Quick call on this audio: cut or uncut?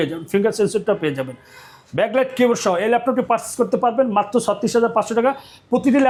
uncut